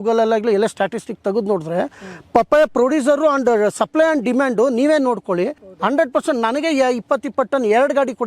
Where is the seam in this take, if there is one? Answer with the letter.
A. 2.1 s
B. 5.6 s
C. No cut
B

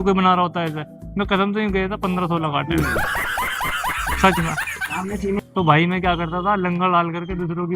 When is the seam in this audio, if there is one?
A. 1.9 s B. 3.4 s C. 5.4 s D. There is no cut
C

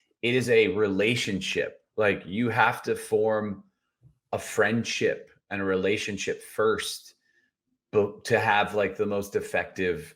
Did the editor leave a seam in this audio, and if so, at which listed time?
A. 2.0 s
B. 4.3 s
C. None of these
C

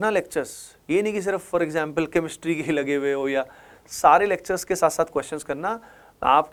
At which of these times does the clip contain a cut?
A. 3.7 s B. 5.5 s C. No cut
C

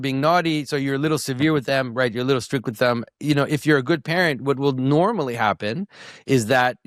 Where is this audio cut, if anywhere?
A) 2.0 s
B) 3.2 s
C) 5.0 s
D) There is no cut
D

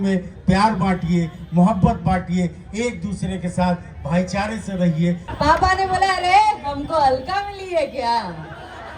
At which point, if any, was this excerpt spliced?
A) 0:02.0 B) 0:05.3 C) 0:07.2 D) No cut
B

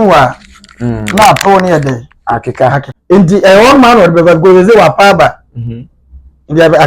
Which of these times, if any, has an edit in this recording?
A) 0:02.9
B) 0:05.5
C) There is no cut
A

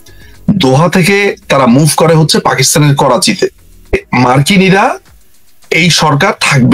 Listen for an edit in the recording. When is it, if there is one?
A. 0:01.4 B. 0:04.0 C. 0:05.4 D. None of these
B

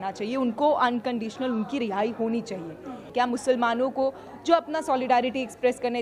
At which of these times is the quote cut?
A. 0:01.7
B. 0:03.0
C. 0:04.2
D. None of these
B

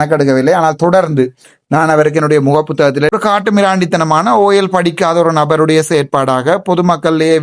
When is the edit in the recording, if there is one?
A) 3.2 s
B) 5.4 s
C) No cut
A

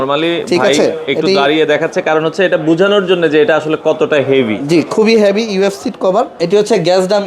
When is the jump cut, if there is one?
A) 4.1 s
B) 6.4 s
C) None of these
B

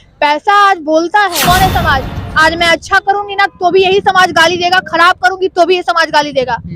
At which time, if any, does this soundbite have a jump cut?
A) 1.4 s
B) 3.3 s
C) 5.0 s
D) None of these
A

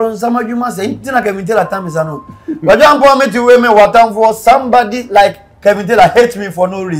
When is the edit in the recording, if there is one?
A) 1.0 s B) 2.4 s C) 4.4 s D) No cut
D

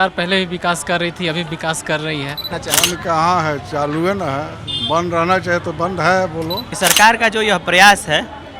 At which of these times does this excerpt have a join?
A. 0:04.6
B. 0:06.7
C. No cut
B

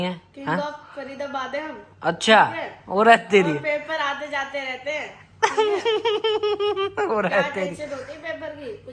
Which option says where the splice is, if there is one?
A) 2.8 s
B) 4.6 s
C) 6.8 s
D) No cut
D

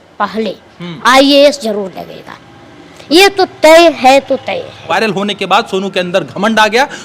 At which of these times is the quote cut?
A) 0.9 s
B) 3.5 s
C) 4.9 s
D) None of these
C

